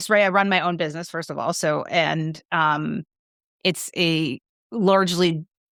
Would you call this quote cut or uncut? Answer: uncut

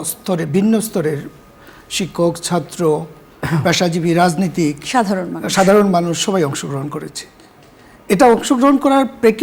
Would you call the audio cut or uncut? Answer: uncut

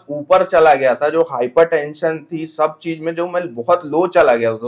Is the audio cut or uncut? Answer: uncut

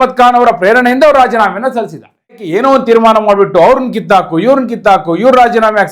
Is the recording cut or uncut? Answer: cut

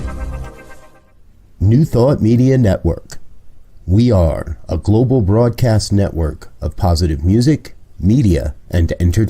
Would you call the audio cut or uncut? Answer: cut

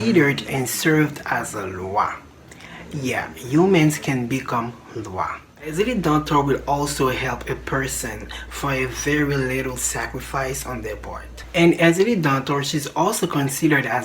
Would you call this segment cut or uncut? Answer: cut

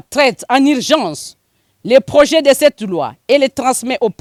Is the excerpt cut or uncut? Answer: uncut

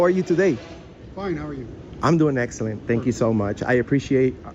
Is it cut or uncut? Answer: uncut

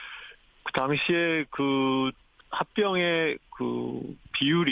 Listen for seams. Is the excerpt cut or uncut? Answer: uncut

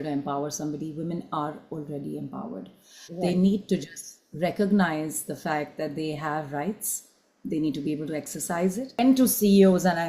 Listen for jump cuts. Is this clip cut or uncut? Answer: cut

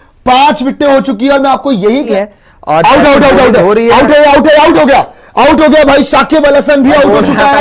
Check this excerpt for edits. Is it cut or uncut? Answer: cut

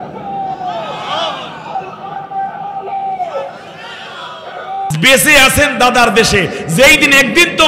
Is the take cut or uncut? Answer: cut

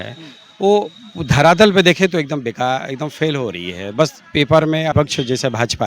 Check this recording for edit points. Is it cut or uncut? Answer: cut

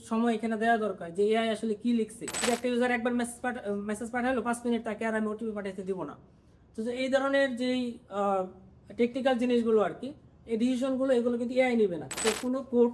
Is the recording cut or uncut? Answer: cut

